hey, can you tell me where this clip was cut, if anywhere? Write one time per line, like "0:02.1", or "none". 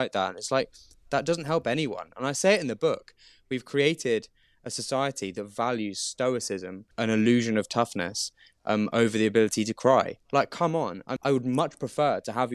0:06.8
0:11.0